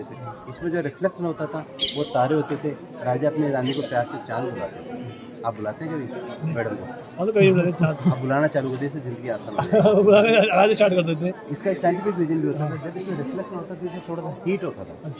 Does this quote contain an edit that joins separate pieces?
no; 0 cuts

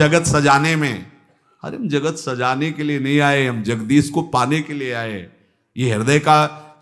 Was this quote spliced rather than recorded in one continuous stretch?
no; 0 cuts

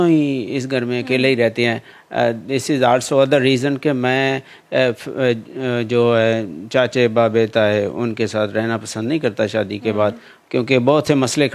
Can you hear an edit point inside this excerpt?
no; 0 cuts

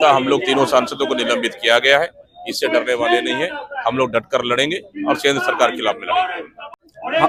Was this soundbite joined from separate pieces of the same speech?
no; 0 cuts

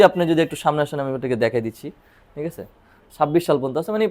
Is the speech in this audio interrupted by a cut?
yes; 1 cut; at 3.0 s

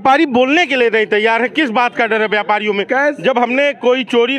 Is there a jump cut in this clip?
no; 0 cuts

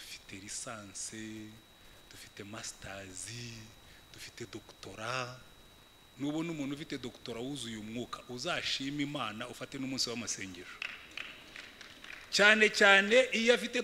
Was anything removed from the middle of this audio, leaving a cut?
no; 0 cuts

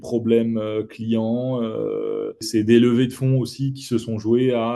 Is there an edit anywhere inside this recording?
yes; 1 cut; at 2.5 s

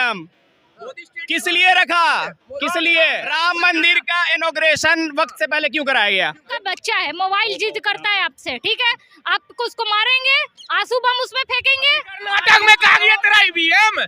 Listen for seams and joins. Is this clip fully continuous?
no; 3 cuts; at 3.3 s, 6.5 s, 12.3 s

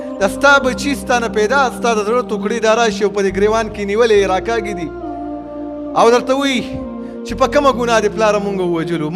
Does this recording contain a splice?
no; 0 cuts

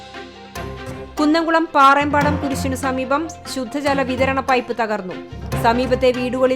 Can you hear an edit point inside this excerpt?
yes; 1 cut; at 1.0 s

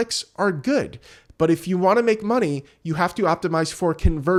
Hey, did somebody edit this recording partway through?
no; 0 cuts

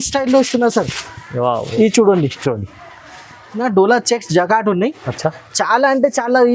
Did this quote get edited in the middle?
yes; 1 cut; at 3.6 s

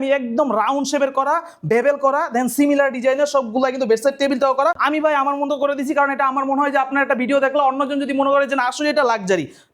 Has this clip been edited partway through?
yes; 1 cut; at 4.8 s

